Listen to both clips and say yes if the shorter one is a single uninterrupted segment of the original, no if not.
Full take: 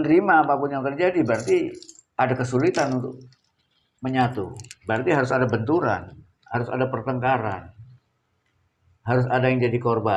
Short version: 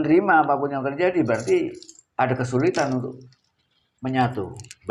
yes